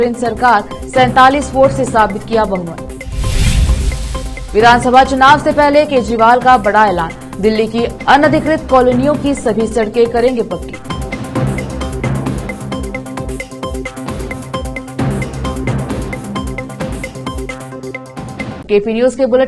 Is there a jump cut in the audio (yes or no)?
no